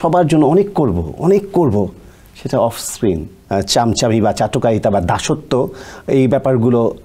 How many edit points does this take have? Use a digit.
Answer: 1